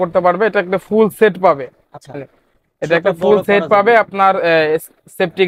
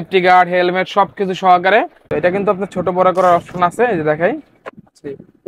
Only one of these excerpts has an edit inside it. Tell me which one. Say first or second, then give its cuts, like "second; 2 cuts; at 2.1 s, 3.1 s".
second; 1 cut; at 2.0 s